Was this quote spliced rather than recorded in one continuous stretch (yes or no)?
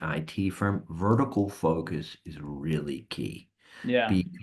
no